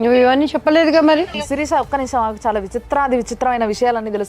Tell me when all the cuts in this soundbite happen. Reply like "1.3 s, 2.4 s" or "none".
1.3 s